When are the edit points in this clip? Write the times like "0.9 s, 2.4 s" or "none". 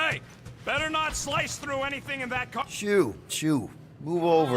2.6 s